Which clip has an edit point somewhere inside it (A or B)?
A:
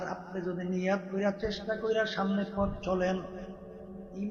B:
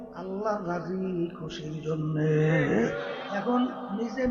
B